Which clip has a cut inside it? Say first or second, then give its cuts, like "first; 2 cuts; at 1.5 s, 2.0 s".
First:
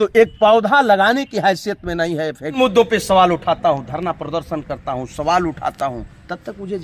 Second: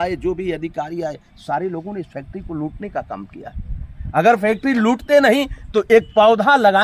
first; 1 cut; at 2.6 s